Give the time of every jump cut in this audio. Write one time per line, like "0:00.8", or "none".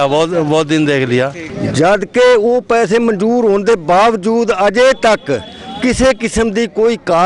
0:01.5